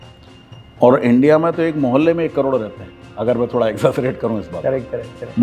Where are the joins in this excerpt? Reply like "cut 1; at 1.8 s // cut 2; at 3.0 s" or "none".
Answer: none